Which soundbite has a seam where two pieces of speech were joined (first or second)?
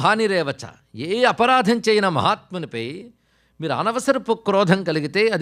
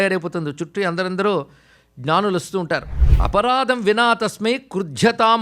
second